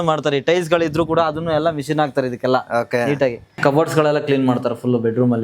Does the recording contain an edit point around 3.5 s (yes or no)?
yes